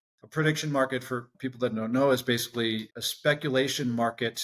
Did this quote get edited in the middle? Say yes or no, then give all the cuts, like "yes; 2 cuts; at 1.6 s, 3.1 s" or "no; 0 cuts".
yes; 2 cuts; at 1.3 s, 2.9 s